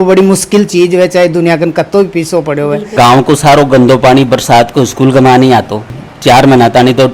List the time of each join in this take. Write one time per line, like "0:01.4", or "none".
0:02.9
0:05.9